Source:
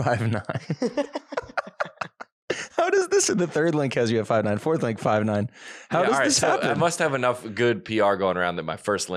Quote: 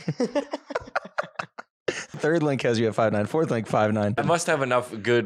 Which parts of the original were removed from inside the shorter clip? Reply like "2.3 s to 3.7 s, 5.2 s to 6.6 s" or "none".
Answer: 2.8 s to 3.5 s, 5.5 s to 6.7 s